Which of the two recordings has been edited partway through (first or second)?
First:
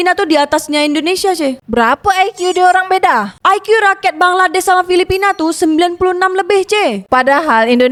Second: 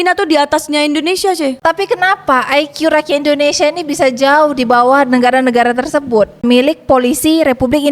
second